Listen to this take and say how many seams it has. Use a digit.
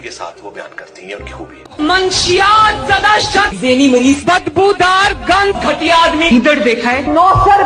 1